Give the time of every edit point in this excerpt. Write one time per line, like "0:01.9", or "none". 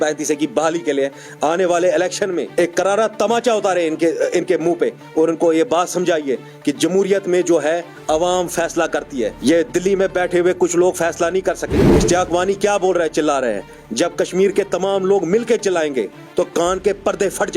0:02.5
0:09.4
0:11.8